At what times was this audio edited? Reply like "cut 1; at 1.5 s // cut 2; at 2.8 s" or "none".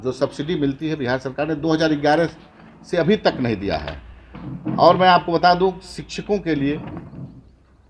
none